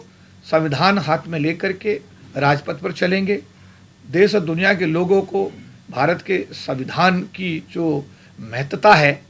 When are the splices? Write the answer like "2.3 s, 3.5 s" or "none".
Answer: none